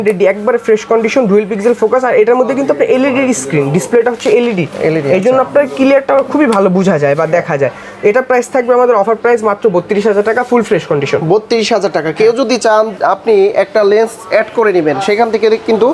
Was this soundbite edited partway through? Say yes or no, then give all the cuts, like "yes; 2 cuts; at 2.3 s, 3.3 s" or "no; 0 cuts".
no; 0 cuts